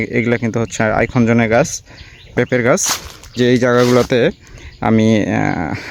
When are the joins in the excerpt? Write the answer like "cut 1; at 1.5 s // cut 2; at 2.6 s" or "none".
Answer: cut 1; at 2.2 s // cut 2; at 3.3 s